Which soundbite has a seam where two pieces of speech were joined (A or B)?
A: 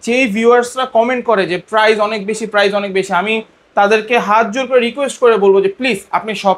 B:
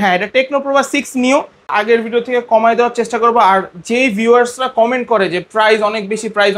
B